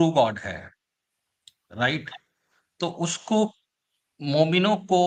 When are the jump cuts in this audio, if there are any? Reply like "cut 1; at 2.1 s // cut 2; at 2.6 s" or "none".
none